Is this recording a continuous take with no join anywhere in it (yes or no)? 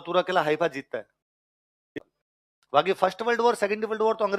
no